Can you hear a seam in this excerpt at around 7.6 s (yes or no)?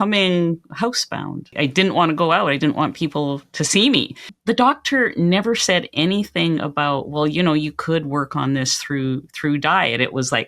no